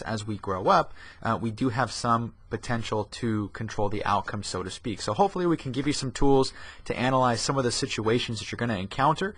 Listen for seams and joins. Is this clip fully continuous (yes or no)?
yes